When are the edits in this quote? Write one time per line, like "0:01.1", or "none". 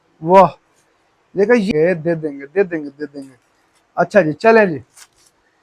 0:01.7